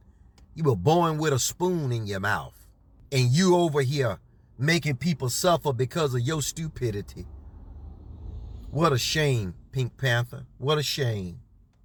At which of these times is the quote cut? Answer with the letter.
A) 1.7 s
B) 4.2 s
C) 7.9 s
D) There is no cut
D